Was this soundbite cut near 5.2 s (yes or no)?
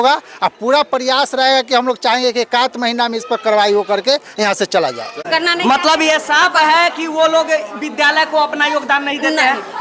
yes